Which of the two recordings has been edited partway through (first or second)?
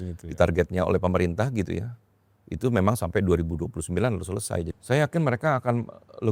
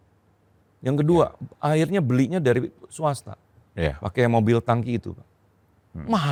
first